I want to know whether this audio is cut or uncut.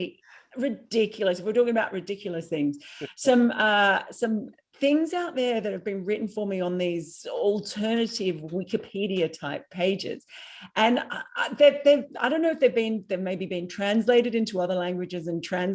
uncut